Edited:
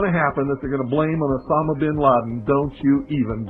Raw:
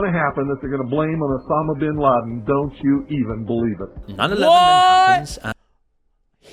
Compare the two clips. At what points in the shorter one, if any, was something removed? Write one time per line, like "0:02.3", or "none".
none